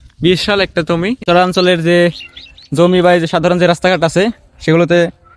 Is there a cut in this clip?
yes; 1 cut; at 1.2 s

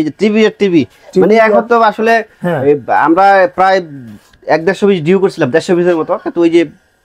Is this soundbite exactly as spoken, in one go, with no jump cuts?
yes; 0 cuts

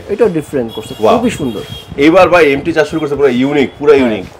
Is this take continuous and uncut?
yes; 0 cuts

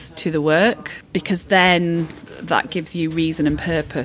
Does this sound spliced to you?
yes; 2 cuts; at 0.9 s, 2.3 s

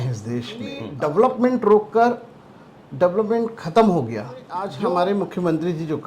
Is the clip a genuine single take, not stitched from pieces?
no; 2 cuts; at 0.9 s, 4.7 s

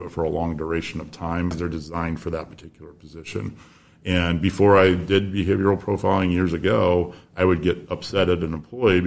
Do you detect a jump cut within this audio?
yes; 1 cut; at 1.5 s

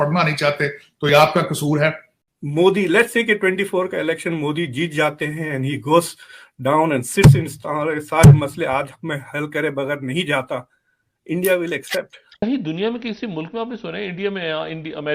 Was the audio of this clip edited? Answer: yes; 2 cuts; at 2.2 s, 12.3 s

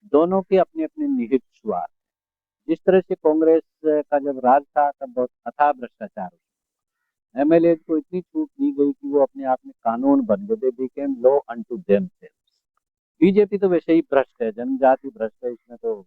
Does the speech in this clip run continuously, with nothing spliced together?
yes; 0 cuts

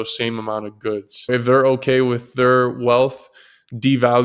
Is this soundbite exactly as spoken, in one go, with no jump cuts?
no; 1 cut; at 1.3 s

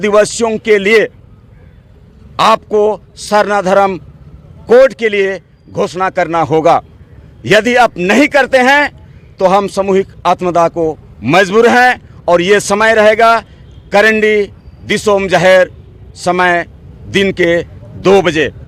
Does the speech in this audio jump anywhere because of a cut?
no; 0 cuts

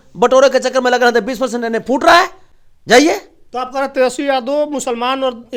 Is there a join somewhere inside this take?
no; 0 cuts

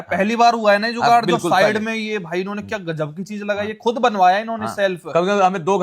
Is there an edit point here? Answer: no; 0 cuts

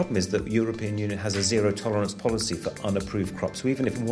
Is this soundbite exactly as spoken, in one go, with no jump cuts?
yes; 0 cuts

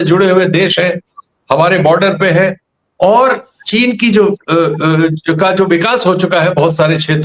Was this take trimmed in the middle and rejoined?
no; 0 cuts

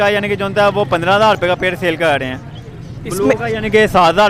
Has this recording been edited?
no; 0 cuts

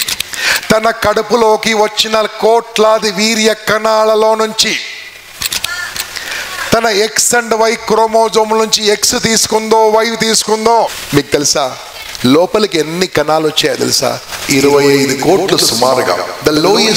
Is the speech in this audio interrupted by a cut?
yes; 1 cut; at 11.0 s

